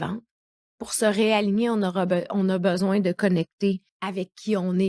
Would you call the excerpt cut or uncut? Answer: cut